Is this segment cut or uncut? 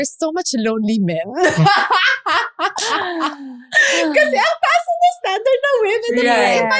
uncut